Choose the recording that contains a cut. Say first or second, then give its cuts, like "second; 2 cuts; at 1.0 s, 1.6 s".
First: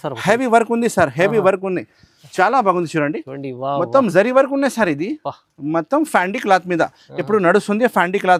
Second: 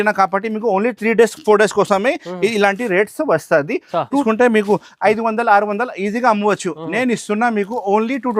second; 1 cut; at 4.2 s